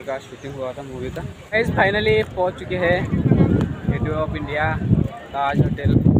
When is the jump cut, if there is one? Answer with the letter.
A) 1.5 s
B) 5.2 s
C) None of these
A